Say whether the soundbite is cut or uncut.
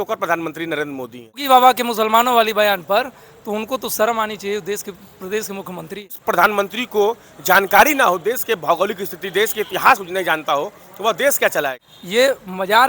cut